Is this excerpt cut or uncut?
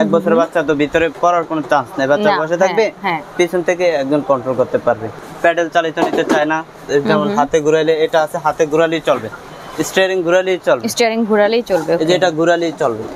cut